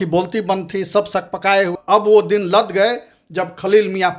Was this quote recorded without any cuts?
no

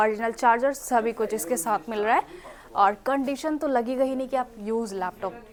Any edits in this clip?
no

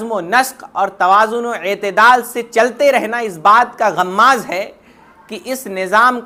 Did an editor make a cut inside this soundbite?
no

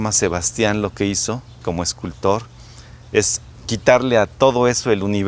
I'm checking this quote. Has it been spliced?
no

